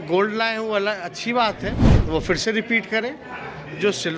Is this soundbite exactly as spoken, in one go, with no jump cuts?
yes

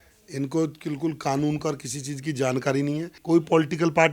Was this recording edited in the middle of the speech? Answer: yes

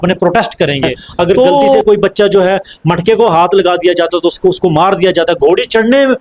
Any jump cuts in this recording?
yes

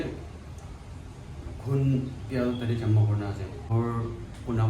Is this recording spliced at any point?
yes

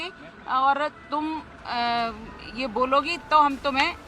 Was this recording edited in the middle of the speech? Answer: no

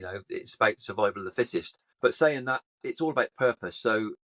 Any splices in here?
yes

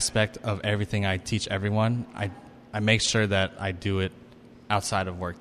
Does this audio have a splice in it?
no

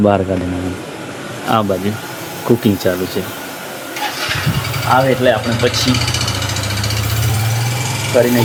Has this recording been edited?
no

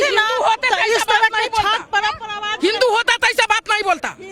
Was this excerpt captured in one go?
yes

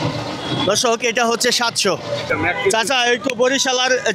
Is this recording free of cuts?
no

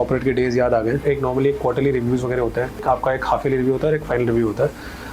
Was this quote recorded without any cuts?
no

